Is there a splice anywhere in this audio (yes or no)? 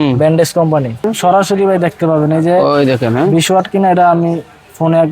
yes